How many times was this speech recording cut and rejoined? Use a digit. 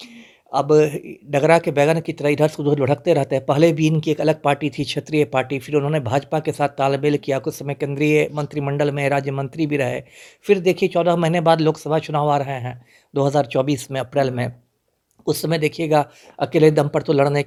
0